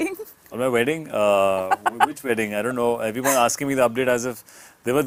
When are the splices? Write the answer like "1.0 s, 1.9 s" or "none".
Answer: none

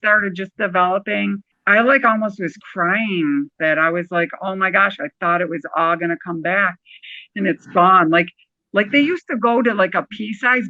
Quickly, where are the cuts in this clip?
3.6 s

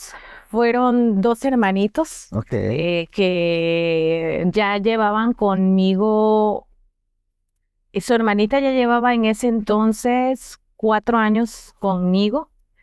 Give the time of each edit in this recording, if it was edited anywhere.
none

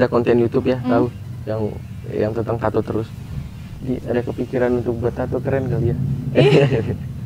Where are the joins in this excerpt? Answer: none

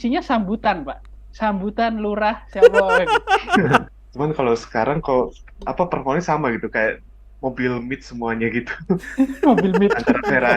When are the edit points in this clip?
3.9 s

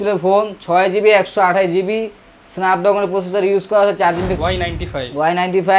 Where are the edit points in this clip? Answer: 4.3 s

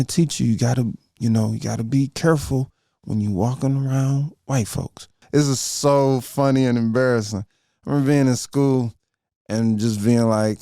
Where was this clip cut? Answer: 5.2 s

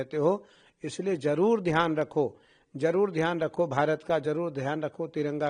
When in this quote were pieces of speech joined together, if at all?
none

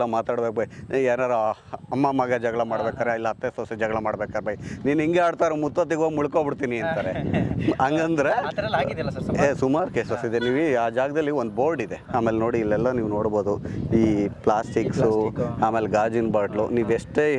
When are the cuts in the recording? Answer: 12.0 s

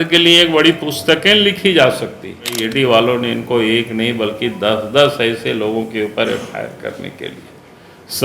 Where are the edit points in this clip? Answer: 2.6 s

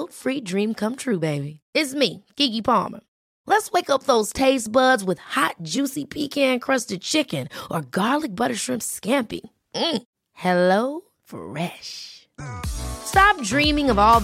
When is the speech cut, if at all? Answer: none

